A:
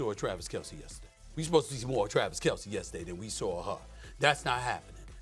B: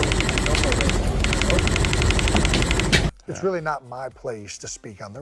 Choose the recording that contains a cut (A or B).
B